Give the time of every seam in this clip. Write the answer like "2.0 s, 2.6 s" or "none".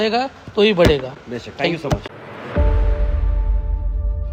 none